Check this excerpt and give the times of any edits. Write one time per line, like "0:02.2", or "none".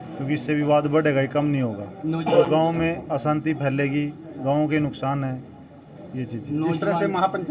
none